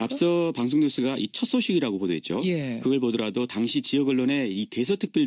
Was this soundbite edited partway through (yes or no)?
yes